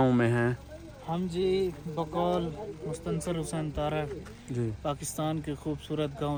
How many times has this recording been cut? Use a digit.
0